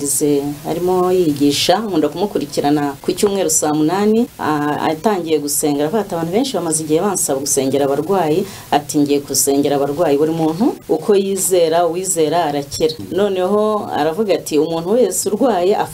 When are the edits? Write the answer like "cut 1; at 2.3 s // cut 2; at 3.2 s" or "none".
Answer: cut 1; at 3.0 s // cut 2; at 4.4 s // cut 3; at 10.8 s // cut 4; at 13.0 s